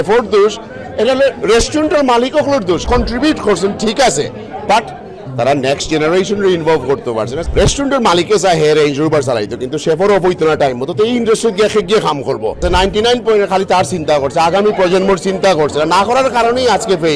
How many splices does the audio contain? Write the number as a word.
three